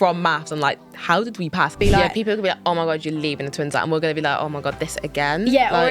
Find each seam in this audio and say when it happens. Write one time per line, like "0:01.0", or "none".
0:01.8